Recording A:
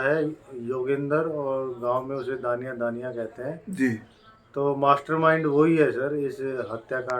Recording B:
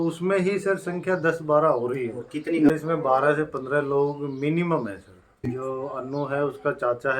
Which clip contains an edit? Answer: B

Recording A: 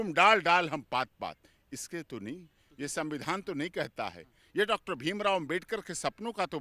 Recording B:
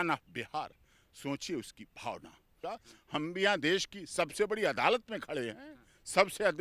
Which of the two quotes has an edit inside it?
B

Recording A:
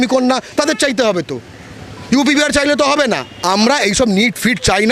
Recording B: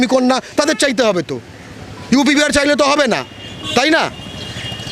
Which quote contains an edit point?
A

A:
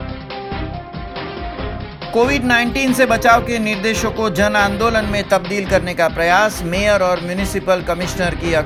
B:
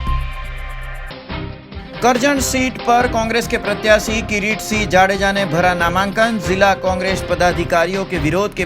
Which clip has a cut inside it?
B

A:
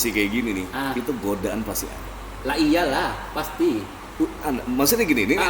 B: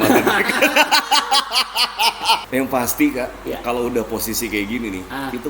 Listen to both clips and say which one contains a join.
B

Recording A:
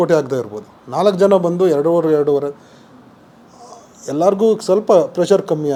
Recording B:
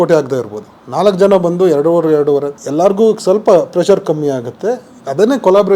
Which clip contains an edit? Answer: B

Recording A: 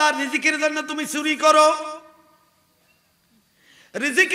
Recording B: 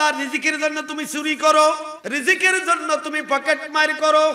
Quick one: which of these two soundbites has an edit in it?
B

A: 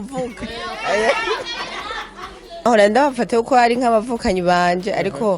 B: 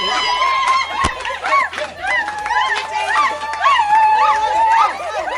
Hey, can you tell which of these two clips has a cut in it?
A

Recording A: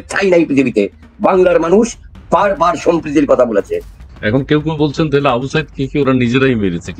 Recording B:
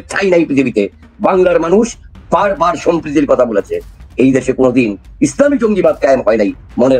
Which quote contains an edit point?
A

